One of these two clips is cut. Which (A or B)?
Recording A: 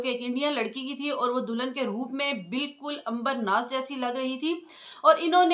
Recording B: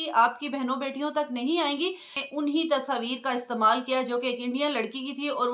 B